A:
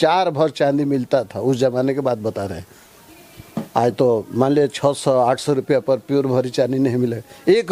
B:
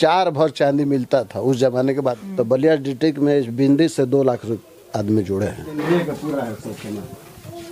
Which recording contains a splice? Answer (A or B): B